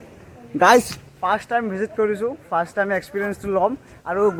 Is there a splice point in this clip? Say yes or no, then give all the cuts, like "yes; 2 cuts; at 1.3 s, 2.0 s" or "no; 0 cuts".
no; 0 cuts